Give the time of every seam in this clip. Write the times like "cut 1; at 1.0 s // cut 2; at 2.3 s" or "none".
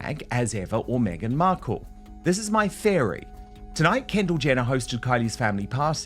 none